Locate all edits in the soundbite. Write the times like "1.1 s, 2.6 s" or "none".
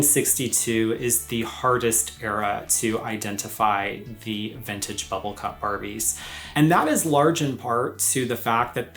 none